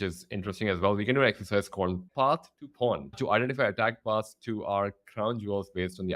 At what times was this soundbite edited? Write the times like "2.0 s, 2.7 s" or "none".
2.0 s, 3.1 s